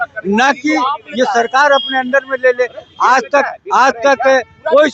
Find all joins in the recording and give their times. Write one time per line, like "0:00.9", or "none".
none